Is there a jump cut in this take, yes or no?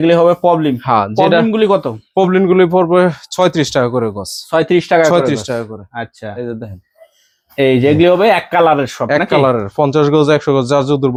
no